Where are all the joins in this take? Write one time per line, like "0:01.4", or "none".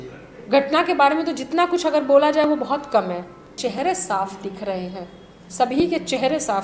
0:03.5